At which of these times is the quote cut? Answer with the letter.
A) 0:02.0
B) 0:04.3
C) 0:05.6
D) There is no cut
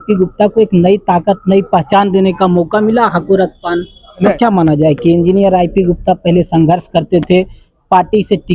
B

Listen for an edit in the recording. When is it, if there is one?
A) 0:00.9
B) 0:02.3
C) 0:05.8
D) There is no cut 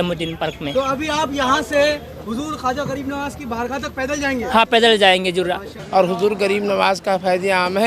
C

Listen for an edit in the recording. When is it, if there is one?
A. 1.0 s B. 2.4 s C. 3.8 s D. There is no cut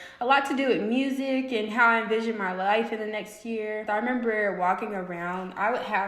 C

